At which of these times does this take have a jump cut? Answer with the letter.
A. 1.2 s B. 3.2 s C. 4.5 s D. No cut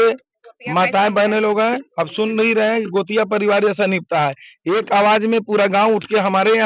D